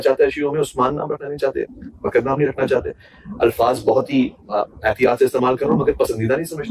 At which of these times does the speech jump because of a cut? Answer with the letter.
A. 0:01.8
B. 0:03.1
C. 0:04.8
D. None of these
D